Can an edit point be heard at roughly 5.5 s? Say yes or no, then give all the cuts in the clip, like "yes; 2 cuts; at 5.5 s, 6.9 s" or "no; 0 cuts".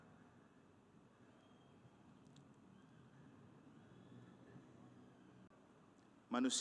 yes; 1 cut; at 5.5 s